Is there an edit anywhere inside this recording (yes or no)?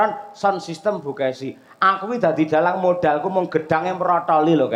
no